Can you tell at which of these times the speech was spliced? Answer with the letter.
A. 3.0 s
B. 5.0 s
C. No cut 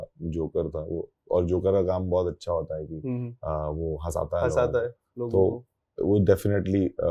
C